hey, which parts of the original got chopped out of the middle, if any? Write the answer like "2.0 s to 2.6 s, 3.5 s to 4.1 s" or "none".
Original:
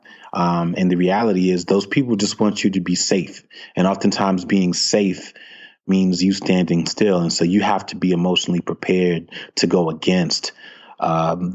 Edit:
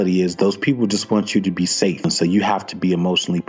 3.4 s to 7.3 s